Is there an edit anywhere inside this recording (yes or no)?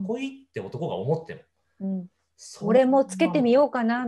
no